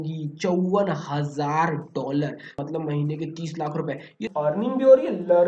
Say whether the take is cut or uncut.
cut